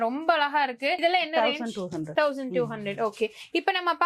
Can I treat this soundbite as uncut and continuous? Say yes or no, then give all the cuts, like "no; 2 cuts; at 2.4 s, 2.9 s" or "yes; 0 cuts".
yes; 0 cuts